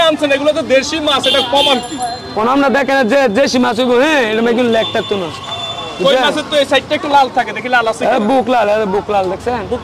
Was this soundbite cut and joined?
no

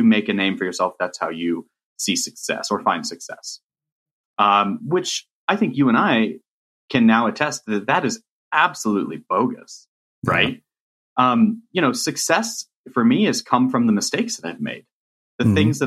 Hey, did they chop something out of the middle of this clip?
no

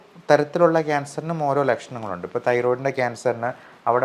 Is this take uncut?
yes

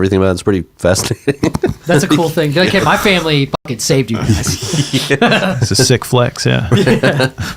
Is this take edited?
yes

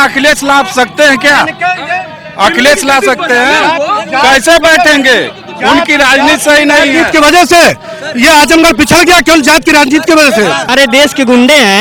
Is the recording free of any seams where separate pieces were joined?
no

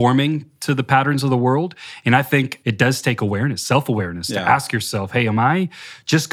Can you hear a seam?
yes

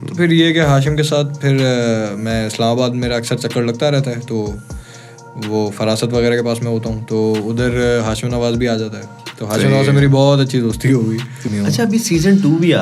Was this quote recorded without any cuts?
no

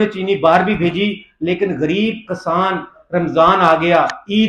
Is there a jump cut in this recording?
no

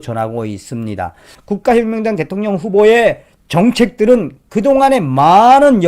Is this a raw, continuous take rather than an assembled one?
no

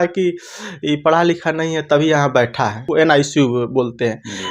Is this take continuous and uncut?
no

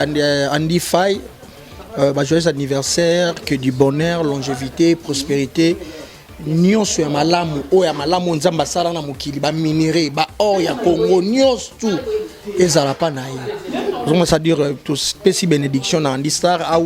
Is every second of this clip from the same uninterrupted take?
yes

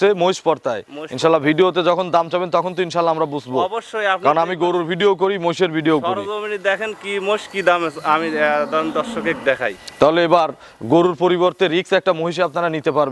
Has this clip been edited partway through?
no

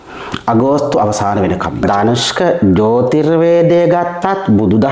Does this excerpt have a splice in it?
yes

